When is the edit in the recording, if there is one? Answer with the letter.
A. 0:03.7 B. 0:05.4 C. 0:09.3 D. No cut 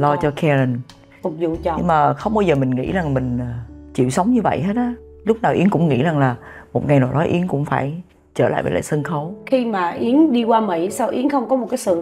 C